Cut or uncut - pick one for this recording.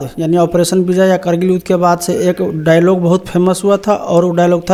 uncut